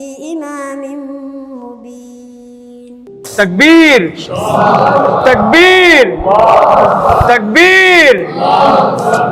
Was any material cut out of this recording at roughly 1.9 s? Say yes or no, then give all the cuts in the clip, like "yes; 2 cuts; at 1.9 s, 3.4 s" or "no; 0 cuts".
no; 1 cut; at 3.2 s